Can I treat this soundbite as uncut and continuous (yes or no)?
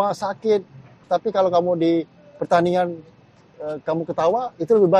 no